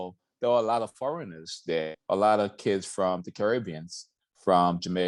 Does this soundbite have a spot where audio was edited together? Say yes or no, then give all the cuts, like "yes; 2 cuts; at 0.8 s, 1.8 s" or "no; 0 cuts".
no; 0 cuts